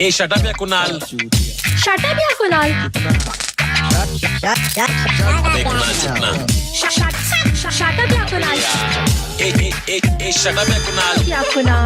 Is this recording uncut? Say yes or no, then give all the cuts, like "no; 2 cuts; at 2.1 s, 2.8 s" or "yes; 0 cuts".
yes; 0 cuts